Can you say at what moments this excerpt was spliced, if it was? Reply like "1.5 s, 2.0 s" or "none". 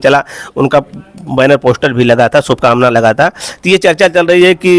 none